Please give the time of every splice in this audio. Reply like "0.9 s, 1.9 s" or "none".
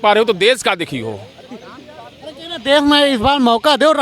none